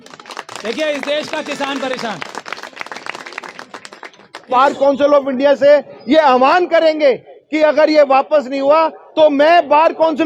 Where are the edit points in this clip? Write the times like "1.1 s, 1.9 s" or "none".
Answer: 4.5 s